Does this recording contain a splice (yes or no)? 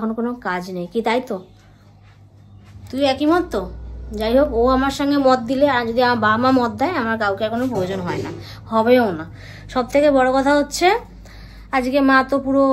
no